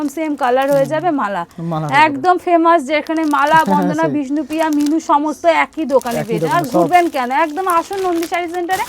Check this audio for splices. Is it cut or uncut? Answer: uncut